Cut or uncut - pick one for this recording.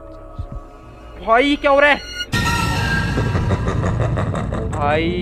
uncut